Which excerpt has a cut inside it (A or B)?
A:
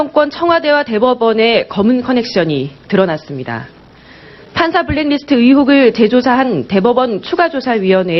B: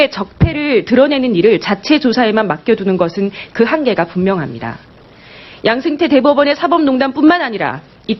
A